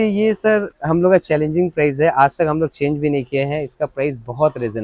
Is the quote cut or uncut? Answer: uncut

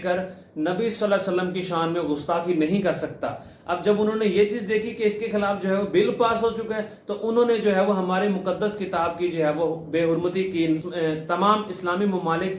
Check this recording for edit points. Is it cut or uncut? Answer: uncut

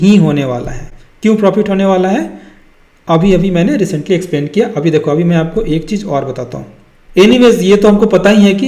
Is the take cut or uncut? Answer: uncut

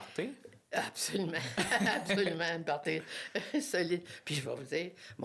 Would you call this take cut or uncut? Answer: uncut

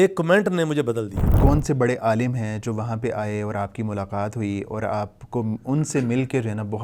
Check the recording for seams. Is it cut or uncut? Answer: cut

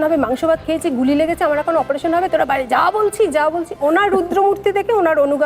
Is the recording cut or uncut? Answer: uncut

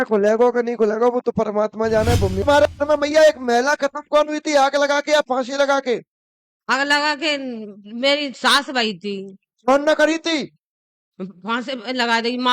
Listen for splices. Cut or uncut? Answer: cut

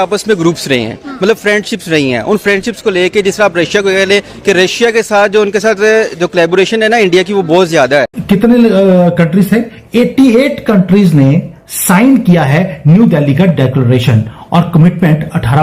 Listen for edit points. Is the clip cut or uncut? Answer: cut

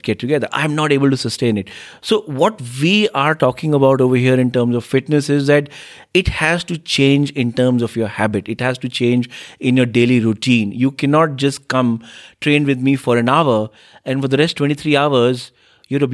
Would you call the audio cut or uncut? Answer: uncut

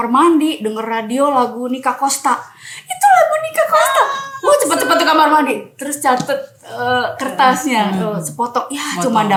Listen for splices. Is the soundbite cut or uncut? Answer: uncut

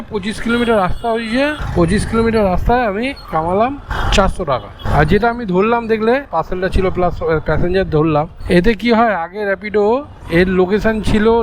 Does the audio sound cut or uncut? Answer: uncut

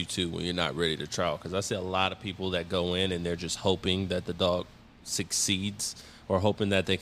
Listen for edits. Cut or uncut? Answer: uncut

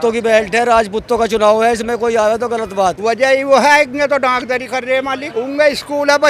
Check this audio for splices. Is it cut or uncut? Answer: cut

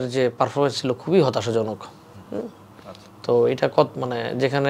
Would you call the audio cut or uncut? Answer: uncut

